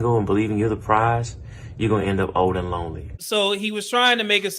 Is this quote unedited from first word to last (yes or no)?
no